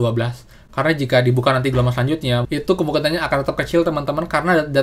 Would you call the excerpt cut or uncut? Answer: cut